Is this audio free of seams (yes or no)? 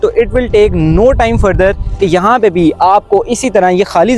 yes